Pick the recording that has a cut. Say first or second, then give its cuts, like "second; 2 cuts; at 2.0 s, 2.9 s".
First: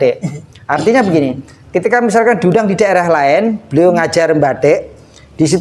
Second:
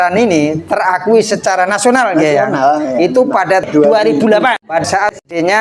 second; 2 cuts; at 3.7 s, 4.8 s